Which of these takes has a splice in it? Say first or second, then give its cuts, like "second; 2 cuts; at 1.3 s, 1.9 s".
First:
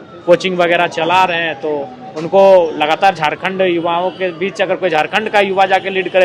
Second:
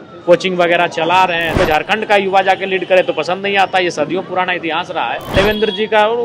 second; 2 cuts; at 1.5 s, 5.3 s